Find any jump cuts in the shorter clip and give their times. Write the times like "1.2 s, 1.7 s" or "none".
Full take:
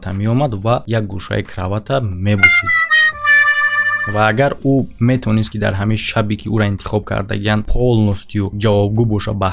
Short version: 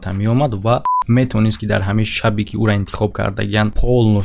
0.9 s